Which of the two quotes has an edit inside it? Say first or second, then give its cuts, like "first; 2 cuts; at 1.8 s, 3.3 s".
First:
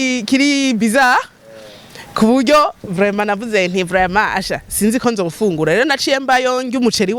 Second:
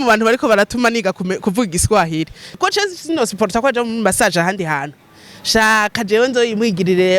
second; 1 cut; at 2.6 s